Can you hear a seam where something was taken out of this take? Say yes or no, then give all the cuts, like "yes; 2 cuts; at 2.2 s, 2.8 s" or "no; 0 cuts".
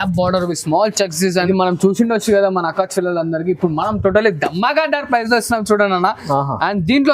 yes; 1 cut; at 1.4 s